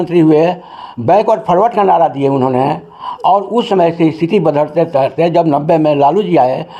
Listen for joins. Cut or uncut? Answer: uncut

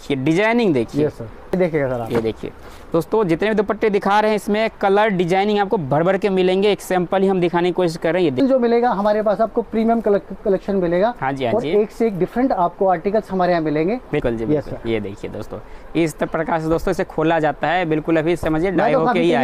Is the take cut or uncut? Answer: cut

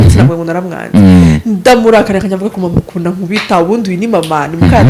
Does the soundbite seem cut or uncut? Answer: uncut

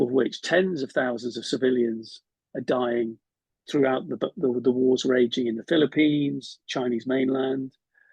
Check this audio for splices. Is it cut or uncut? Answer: uncut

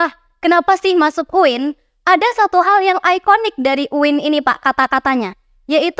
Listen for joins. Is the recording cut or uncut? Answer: uncut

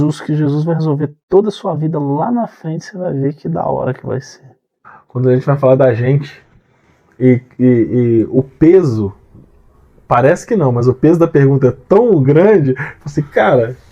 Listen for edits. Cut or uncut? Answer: cut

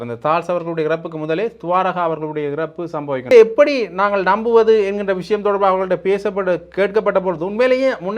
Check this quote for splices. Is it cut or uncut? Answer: cut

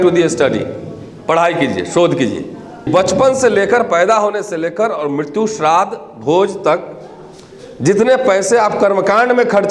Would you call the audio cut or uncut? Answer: cut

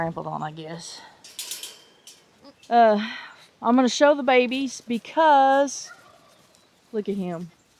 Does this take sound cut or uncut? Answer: uncut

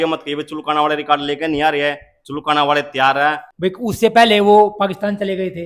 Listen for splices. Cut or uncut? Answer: cut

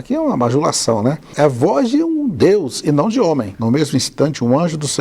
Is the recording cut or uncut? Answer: cut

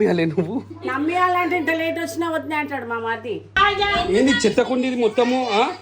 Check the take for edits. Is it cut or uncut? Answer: cut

